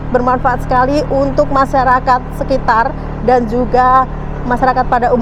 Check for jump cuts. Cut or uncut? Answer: uncut